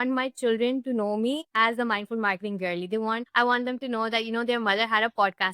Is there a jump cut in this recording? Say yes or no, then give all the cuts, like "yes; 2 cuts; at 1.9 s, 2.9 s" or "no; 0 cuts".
yes; 2 cuts; at 1.5 s, 3.3 s